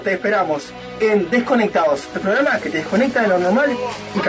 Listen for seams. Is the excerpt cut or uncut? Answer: uncut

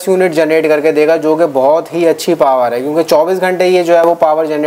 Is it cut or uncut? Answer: uncut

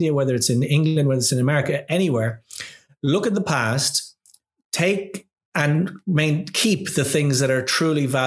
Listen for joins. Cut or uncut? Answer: uncut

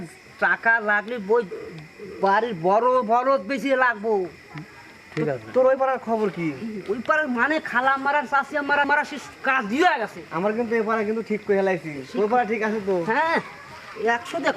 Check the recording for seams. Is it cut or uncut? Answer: cut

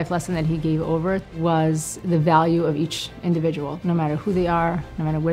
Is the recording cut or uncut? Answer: cut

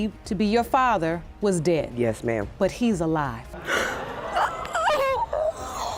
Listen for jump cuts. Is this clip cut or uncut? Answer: uncut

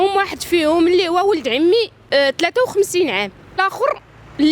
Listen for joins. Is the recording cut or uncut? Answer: cut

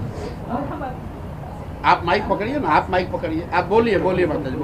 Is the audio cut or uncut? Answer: uncut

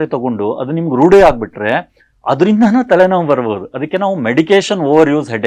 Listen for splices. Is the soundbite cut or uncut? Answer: uncut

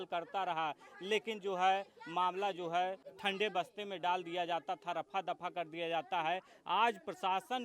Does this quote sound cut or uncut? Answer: cut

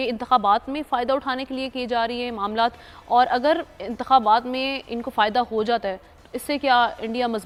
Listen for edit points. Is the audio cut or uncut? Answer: uncut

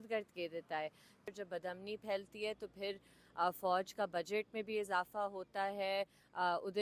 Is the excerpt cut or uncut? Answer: cut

